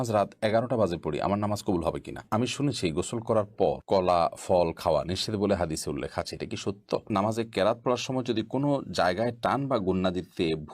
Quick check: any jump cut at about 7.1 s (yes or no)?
yes